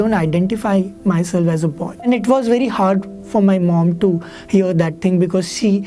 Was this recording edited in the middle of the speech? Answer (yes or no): yes